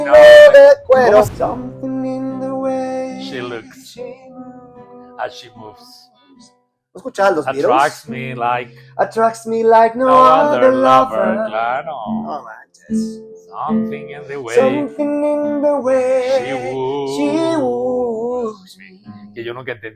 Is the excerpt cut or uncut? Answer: cut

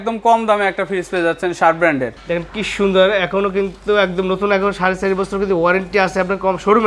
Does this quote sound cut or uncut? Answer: cut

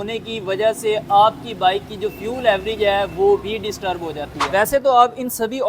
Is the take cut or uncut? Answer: cut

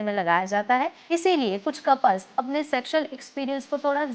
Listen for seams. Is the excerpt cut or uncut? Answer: cut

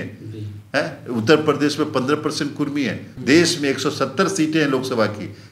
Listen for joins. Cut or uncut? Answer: cut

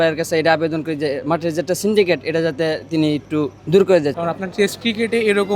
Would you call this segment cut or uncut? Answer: cut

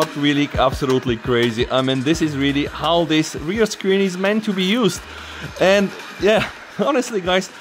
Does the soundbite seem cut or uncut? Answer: uncut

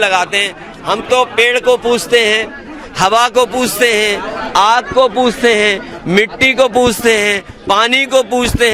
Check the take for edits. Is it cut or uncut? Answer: uncut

